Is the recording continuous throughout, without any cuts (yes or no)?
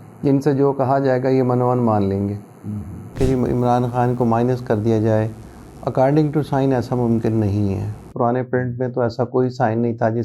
no